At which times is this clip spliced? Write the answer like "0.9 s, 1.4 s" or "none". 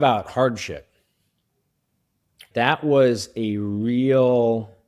2.5 s